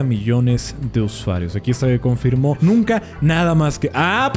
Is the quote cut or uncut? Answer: cut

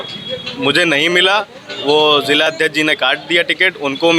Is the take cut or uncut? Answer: uncut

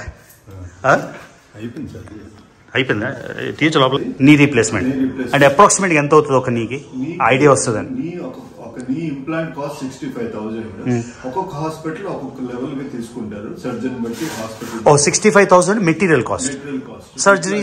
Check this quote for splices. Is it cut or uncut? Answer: cut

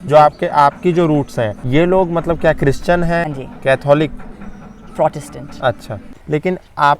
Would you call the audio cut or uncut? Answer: cut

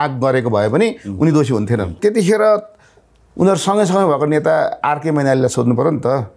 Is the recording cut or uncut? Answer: cut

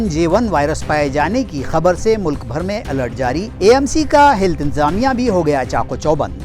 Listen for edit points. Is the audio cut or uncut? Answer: uncut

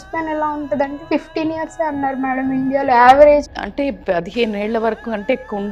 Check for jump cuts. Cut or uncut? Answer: cut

